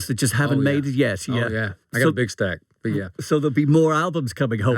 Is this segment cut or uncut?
cut